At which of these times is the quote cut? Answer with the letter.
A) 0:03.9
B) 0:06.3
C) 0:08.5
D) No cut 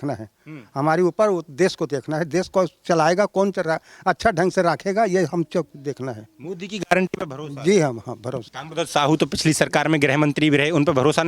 C